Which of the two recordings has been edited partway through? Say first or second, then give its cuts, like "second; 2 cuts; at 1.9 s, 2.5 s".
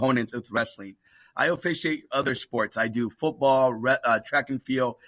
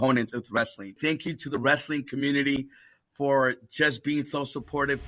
second; 1 cut; at 1.0 s